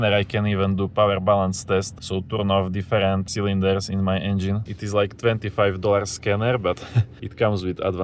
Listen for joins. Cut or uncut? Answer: cut